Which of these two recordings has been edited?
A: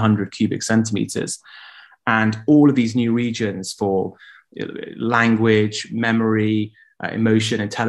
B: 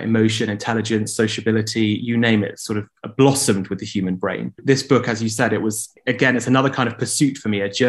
B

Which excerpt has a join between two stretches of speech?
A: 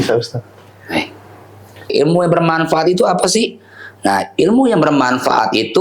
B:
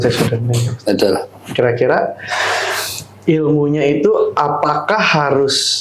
A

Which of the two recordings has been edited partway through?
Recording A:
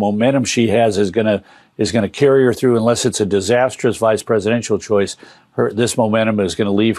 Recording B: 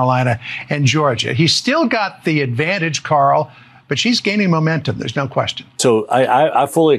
B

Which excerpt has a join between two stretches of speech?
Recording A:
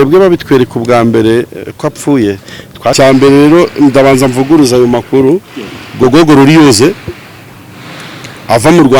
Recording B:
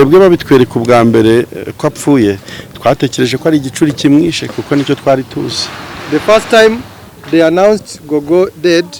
A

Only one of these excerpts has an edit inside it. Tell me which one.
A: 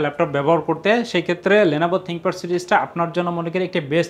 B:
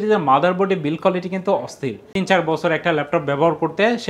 B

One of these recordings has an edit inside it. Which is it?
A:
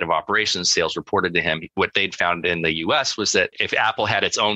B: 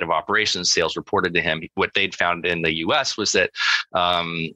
A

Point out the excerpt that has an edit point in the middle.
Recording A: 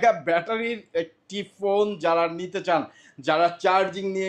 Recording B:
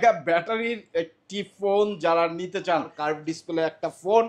B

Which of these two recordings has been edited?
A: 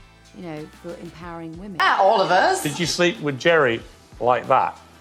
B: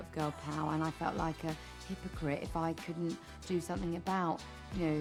A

